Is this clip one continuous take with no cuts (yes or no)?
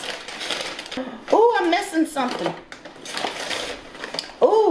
no